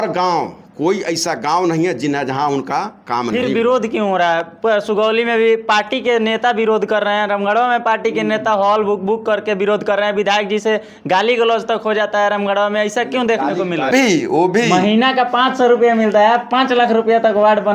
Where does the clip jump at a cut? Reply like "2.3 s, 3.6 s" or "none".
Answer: 13.9 s